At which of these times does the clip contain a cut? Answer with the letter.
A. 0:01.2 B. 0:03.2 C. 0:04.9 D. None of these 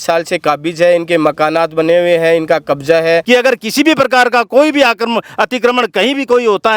B